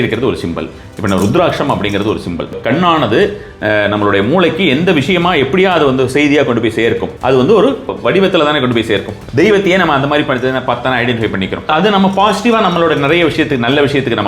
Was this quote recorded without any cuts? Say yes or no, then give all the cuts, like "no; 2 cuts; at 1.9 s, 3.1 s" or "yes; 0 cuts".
no; 5 cuts; at 2.5 s, 7.1 s, 7.9 s, 9.2 s, 11.7 s